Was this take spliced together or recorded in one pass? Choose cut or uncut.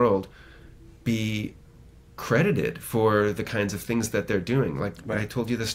uncut